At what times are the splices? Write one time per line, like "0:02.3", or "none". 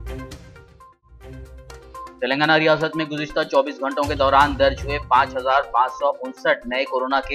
0:02.0